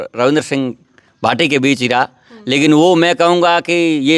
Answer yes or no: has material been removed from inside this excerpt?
no